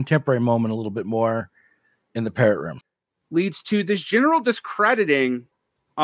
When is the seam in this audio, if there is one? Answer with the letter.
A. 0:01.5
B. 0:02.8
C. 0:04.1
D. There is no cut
B